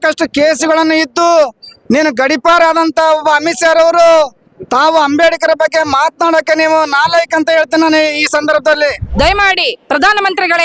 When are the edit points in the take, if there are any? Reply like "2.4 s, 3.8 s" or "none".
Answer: 9.0 s